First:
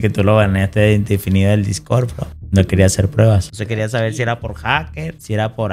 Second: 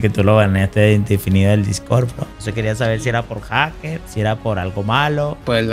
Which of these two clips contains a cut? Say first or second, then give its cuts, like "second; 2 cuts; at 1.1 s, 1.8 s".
second; 1 cut; at 2.4 s